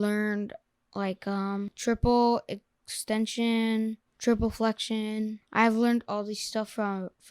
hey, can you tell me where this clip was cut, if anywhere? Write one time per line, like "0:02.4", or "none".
0:01.7
0:04.1
0:05.4